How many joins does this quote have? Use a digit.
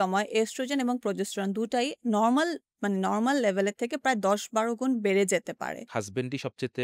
1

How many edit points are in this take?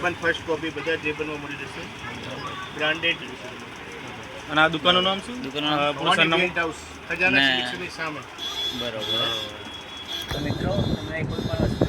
1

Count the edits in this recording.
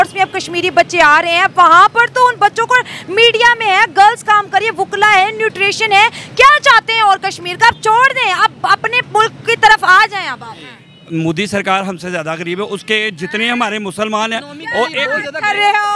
1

